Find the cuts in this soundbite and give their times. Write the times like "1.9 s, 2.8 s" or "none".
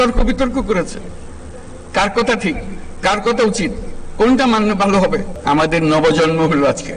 5.3 s